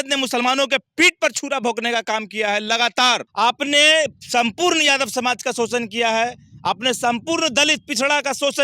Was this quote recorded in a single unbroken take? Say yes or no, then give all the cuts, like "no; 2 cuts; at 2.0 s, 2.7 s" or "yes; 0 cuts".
no; 1 cut; at 3.3 s